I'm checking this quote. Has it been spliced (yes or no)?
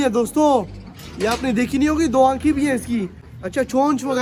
no